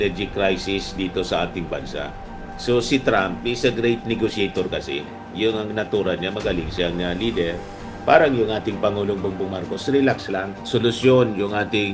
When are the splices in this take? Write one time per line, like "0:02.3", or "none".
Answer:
0:10.6